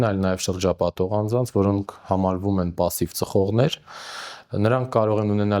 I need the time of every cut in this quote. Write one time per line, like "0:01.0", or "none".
none